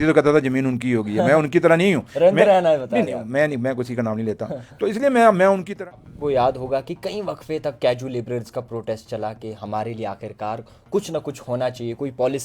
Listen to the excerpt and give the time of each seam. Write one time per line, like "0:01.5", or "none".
0:05.7